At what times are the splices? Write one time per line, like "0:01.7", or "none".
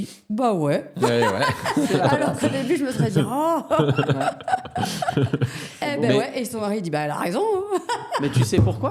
none